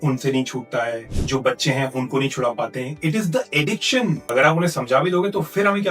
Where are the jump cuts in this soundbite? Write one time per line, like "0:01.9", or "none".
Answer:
0:01.1
0:04.2